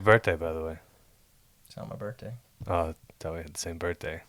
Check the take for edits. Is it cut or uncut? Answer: uncut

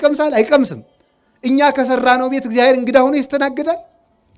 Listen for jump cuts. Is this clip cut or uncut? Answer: uncut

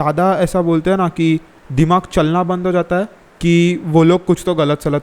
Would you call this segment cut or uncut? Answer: cut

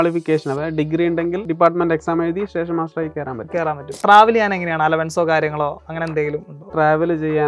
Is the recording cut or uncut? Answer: cut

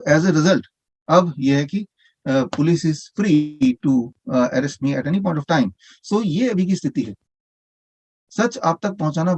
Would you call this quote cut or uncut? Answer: cut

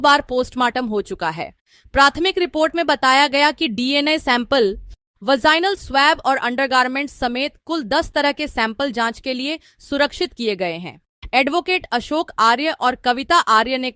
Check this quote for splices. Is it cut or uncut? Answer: uncut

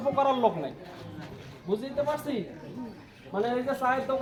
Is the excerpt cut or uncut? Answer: uncut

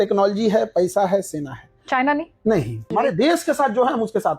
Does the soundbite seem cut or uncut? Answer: cut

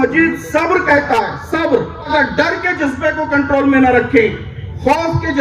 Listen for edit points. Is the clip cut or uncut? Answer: cut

